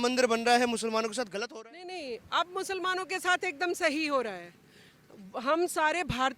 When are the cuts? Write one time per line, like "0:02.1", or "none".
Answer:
0:01.4